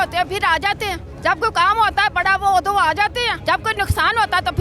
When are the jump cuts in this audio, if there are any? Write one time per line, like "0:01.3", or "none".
0:01.1
0:03.4